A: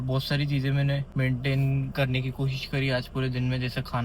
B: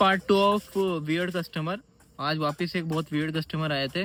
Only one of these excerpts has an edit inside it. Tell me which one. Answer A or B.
A